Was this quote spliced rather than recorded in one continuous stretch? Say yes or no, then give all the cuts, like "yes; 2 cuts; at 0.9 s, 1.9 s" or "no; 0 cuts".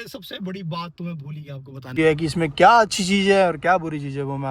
yes; 1 cut; at 1.9 s